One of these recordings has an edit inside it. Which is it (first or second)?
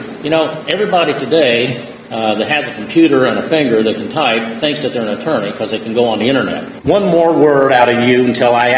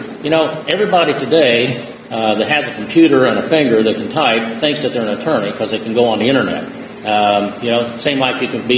first